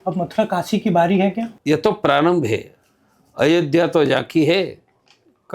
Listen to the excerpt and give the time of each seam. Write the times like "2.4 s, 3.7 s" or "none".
1.5 s